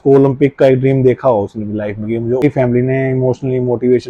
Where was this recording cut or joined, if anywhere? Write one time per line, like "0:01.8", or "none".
0:02.4